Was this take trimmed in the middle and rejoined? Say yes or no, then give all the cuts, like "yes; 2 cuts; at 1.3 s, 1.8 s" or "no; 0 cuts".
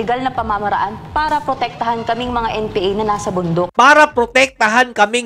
yes; 1 cut; at 3.7 s